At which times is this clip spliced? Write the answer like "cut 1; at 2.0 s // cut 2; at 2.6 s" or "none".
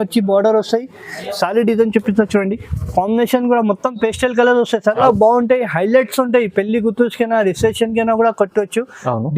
cut 1; at 5.0 s